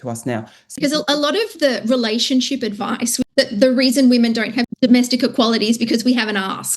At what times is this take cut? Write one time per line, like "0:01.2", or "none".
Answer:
0:00.8
0:03.3
0:04.7